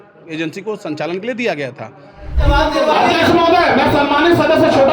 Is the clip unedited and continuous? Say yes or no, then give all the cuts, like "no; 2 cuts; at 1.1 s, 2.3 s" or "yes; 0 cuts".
no; 1 cut; at 2.4 s